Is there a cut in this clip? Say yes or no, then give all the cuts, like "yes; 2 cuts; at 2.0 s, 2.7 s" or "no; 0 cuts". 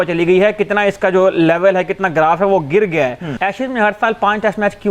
yes; 1 cut; at 3.2 s